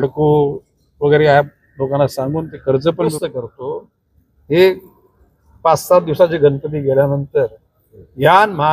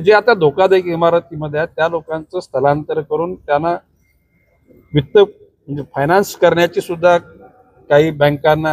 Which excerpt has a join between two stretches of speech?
first; 1 cut; at 3.1 s

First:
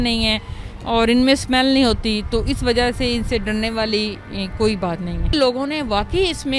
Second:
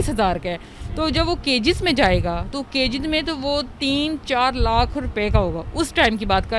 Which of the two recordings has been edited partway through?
first; 1 cut; at 5.3 s

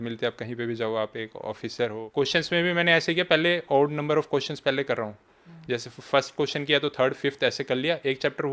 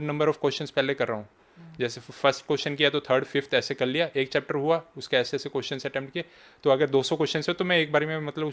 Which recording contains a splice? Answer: first; 1 cut; at 2.0 s

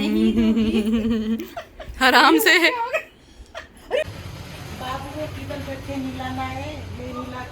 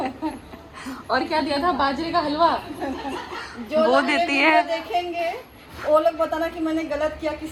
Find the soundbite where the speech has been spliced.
first; 1 cut; at 4.1 s

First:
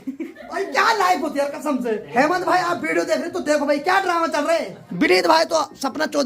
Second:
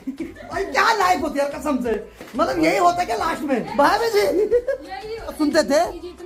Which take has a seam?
first; 2 cuts; at 2.0 s, 4.8 s

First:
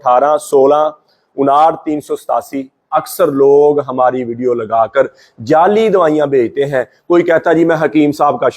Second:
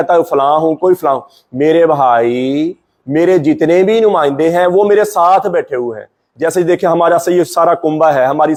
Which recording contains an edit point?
first; 1 cut; at 2.9 s

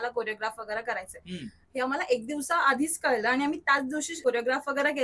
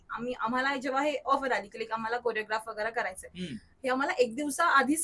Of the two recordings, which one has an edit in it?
first; 1 cut; at 4.1 s

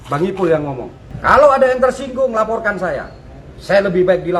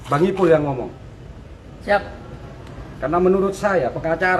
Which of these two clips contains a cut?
first; 1 cut; at 1.1 s

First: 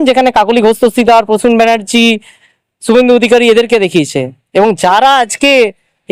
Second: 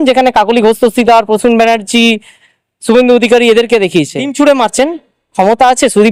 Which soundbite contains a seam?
second; 1 cut; at 4.2 s

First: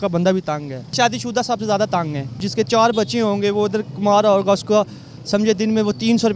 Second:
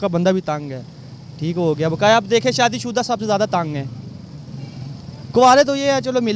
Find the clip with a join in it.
first; 2 cuts; at 1.0 s, 2.5 s

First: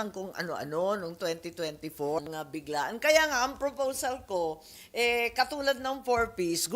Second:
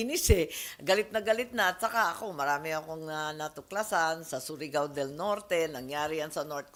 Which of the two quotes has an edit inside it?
first; 1 cut; at 2.2 s

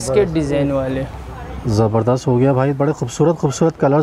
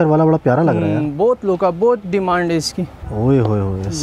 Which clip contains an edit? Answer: second; 1 cut; at 3.0 s

